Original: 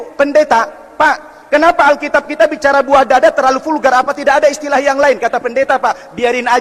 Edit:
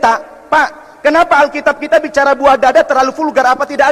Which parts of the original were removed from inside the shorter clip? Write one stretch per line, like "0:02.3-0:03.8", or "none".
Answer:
none